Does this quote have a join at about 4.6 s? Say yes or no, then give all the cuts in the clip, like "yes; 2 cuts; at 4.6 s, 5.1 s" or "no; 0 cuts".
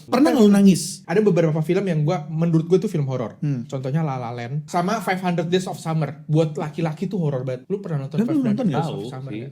yes; 3 cuts; at 0.9 s, 4.6 s, 7.6 s